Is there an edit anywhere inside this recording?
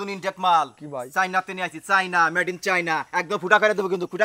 no; 0 cuts

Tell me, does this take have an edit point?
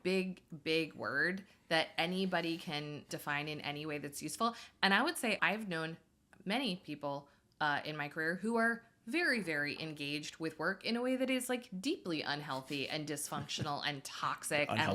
yes; 2 cuts; at 3.1 s, 5.4 s

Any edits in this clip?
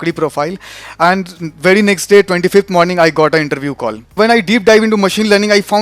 yes; 1 cut; at 4.2 s

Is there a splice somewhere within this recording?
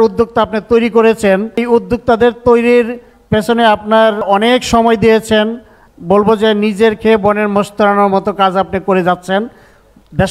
no; 0 cuts

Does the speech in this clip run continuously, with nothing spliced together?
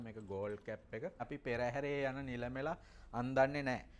no; 1 cut; at 1.2 s

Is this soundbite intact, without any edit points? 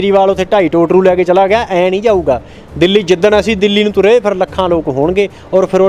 yes; 0 cuts

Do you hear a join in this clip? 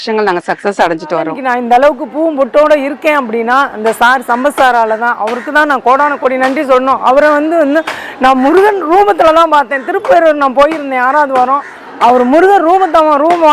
yes; 1 cut; at 1.4 s

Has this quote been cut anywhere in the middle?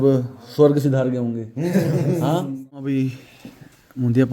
yes; 1 cut; at 2.8 s

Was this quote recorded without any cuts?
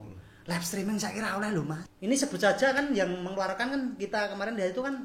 no; 1 cut; at 1.8 s

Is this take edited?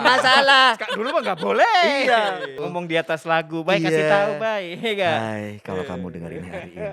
yes; 1 cut; at 2.6 s

